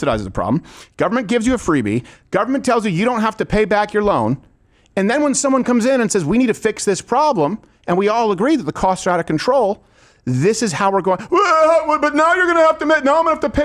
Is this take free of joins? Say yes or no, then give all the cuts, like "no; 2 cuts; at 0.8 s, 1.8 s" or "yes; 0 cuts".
yes; 0 cuts